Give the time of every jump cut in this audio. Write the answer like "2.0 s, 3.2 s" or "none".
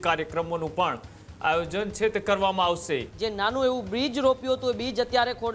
3.1 s